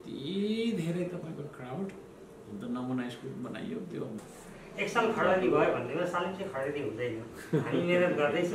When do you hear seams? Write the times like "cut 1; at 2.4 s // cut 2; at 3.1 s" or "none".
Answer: cut 1; at 4.2 s